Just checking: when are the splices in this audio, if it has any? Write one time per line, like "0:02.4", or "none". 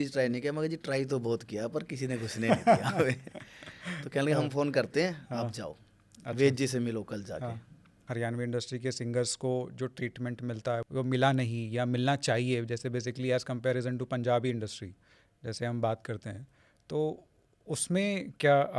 0:08.0
0:10.8